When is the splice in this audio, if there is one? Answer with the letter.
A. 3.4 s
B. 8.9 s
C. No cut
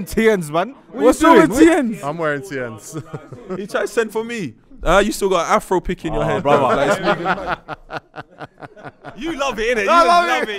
A